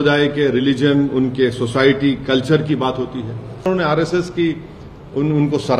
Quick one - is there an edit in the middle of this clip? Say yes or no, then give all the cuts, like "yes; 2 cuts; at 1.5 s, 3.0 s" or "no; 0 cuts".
yes; 1 cut; at 3.7 s